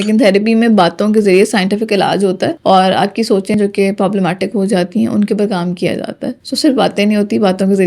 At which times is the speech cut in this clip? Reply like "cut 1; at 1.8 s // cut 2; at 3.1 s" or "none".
none